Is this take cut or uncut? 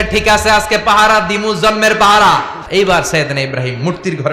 cut